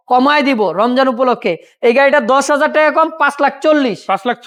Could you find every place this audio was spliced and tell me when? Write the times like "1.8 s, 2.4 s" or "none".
none